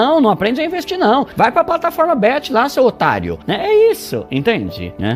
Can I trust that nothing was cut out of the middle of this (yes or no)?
yes